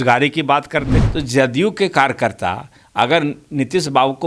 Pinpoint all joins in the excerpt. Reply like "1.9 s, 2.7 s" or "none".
1.0 s